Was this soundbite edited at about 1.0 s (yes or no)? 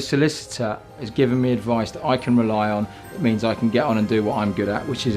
yes